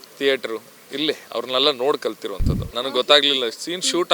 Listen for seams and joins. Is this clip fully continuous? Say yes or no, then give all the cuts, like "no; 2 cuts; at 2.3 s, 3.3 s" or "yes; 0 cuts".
no; 1 cut; at 2.7 s